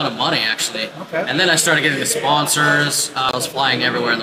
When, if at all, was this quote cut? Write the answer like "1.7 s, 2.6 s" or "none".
3.3 s